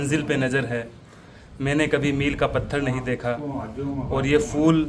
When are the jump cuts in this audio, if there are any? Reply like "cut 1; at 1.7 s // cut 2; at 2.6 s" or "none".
none